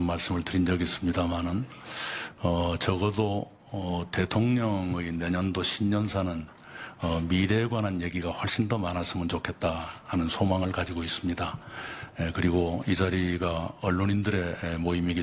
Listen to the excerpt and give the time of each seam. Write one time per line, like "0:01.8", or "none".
none